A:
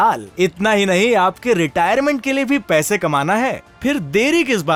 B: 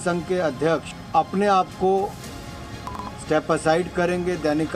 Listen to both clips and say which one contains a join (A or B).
B